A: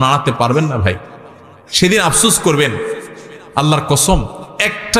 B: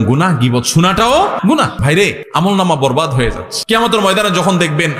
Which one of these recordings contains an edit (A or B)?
B